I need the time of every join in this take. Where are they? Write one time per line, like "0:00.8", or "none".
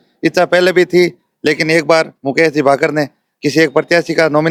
none